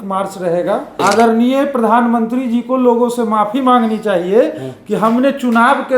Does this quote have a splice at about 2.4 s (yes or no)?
no